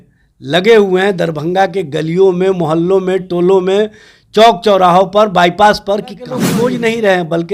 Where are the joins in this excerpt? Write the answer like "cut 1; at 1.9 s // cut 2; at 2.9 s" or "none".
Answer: cut 1; at 6.5 s